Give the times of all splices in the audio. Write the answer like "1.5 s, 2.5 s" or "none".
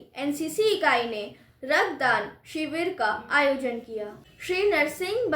4.2 s